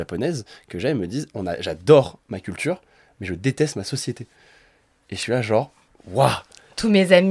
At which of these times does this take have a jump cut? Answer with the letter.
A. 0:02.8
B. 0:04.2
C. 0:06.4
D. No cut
D